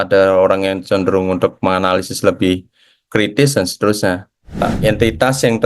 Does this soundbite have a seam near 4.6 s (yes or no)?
yes